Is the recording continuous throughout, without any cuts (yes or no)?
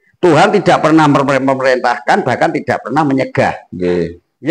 yes